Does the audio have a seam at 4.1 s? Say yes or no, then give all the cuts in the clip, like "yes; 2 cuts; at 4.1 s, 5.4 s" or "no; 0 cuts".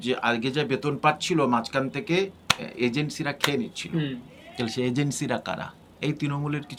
no; 0 cuts